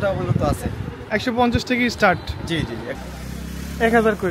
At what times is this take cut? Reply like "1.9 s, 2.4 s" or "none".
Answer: 3.0 s